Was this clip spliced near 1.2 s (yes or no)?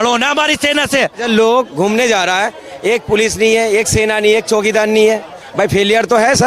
yes